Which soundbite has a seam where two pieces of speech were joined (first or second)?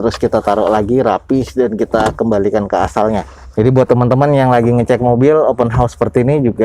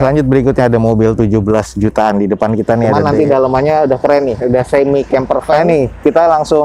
second